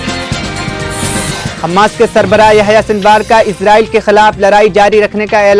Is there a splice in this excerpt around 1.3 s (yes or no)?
yes